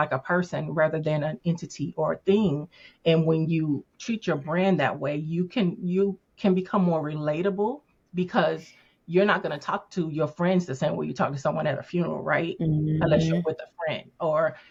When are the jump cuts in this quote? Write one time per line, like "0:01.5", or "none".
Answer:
none